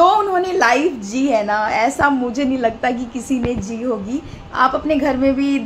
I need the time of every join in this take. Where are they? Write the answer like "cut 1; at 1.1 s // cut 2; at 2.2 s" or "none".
cut 1; at 4.4 s